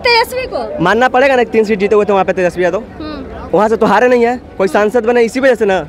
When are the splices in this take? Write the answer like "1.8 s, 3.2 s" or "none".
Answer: none